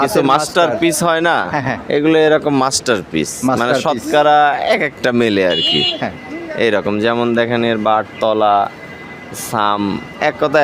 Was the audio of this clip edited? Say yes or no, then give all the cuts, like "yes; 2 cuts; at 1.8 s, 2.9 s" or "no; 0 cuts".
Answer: no; 0 cuts